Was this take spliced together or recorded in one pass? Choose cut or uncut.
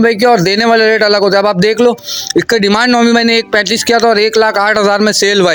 uncut